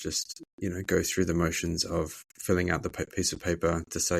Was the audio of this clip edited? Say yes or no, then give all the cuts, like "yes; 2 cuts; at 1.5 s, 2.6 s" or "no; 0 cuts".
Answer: yes; 1 cut; at 2.3 s